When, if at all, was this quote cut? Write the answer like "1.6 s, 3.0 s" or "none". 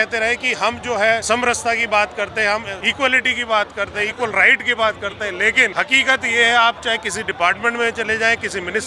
1.2 s, 2.8 s, 5.7 s